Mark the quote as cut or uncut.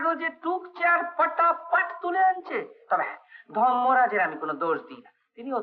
uncut